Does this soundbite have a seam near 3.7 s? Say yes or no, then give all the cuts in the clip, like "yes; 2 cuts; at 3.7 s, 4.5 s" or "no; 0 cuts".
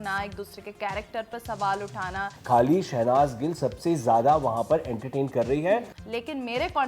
no; 2 cuts; at 2.3 s, 6.0 s